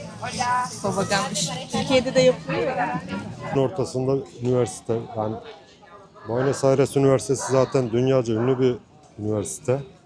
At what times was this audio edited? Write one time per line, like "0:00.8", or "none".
0:03.5